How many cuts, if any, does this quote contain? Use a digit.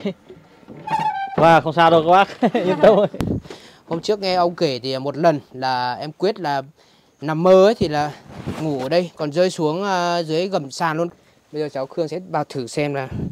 3